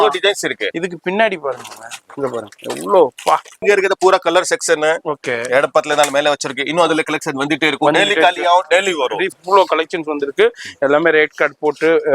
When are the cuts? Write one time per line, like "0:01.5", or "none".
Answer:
0:03.6
0:09.3